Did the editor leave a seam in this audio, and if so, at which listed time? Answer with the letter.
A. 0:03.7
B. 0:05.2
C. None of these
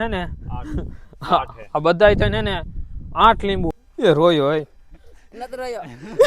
A